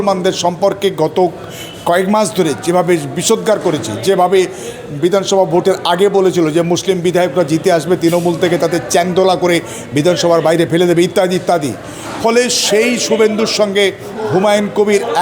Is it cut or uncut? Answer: uncut